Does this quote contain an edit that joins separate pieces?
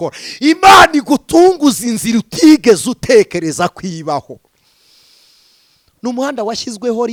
no; 0 cuts

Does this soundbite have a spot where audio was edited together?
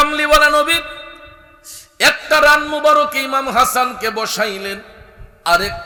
no; 0 cuts

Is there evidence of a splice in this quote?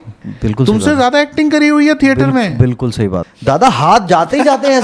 yes; 1 cut; at 3.3 s

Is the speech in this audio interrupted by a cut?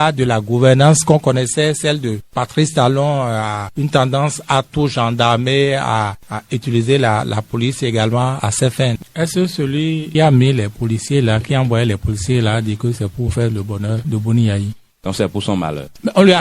yes; 1 cut; at 9.0 s

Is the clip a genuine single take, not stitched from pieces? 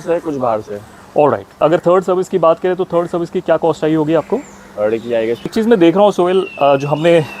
no; 2 cuts; at 1.5 s, 5.5 s

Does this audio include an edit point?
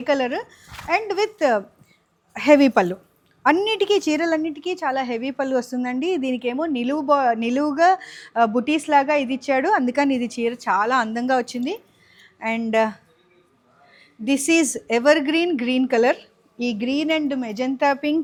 no; 0 cuts

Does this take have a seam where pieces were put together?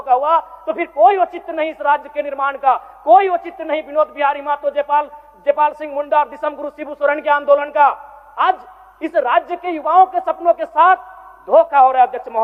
no; 0 cuts

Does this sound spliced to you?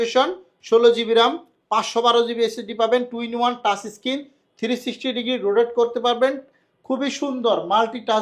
no; 0 cuts

